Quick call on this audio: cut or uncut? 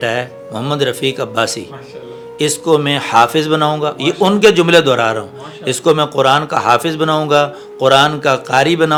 uncut